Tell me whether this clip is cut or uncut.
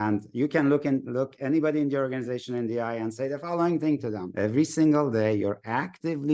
cut